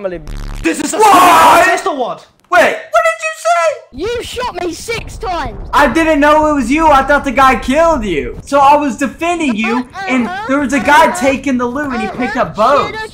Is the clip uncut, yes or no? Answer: no